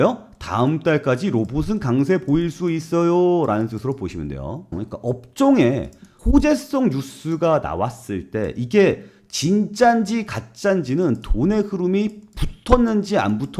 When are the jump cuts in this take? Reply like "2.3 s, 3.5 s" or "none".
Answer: 4.7 s